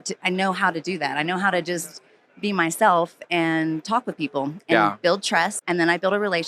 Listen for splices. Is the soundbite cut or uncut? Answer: cut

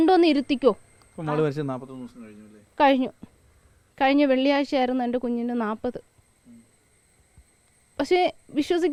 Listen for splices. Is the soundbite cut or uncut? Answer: uncut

